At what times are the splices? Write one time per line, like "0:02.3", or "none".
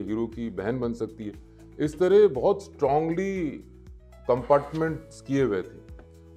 none